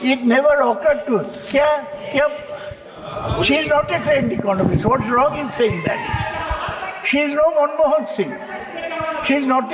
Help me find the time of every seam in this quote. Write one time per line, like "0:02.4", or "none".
none